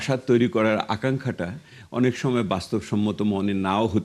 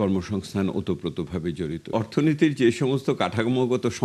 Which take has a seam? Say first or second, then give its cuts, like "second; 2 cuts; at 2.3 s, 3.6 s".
second; 1 cut; at 1.9 s